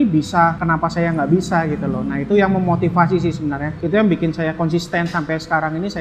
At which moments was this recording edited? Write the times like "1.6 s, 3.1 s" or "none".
none